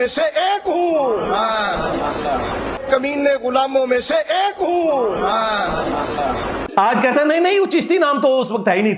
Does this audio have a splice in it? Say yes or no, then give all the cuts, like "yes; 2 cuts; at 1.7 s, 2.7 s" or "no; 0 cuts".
no; 0 cuts